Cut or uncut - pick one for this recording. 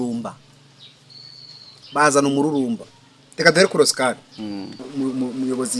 cut